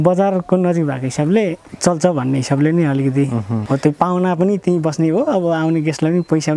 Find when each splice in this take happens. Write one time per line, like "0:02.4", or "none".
0:01.7
0:03.6